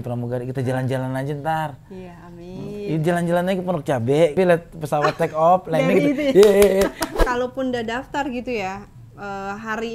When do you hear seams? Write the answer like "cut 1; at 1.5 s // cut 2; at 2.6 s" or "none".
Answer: cut 1; at 4.3 s // cut 2; at 7.1 s